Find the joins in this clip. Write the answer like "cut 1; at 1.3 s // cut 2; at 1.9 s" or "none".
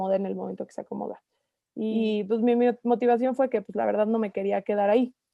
cut 1; at 1.9 s